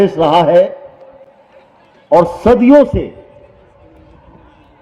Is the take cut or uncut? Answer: uncut